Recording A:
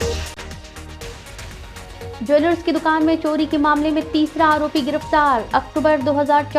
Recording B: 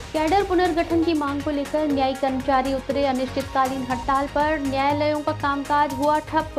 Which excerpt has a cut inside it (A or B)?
A